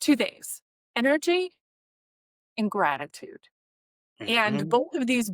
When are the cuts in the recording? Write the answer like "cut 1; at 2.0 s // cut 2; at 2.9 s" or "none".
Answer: none